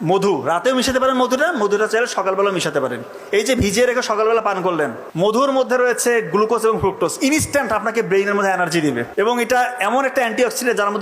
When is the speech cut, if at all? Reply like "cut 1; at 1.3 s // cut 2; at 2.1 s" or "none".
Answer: cut 1; at 5.4 s // cut 2; at 9.1 s